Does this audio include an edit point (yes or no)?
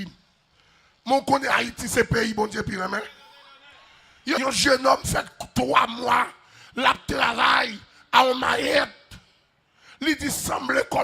yes